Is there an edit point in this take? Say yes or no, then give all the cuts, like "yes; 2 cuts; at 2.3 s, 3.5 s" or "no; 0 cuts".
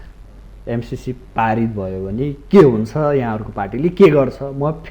no; 0 cuts